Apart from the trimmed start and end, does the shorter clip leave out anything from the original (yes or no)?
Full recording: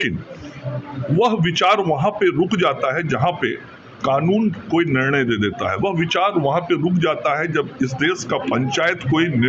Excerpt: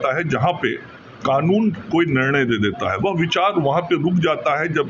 no